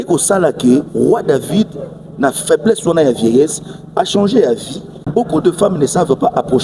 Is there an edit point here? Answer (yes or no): yes